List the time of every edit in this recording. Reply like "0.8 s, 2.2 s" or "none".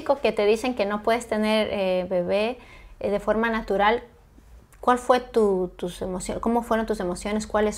none